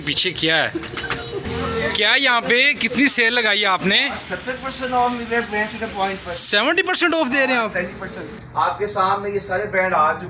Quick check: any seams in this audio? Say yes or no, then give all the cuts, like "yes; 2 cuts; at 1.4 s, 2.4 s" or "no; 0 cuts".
yes; 2 cuts; at 1.4 s, 8.4 s